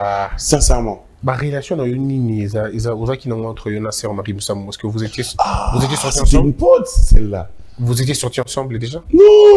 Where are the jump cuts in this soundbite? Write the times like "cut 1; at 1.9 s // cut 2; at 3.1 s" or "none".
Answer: cut 1; at 1.2 s